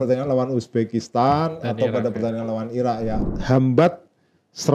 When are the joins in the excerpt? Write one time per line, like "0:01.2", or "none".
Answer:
0:03.3